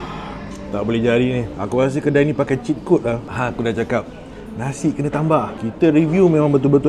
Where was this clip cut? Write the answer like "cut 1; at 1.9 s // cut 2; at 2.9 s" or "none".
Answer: cut 1; at 1.5 s // cut 2; at 3.3 s